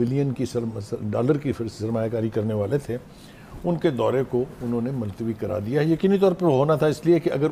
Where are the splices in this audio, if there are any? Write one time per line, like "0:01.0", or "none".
none